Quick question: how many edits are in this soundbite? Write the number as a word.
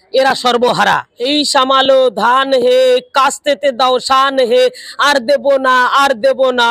one